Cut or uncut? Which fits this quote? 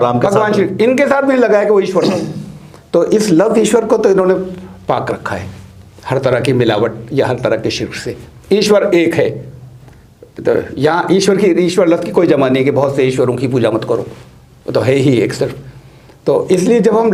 uncut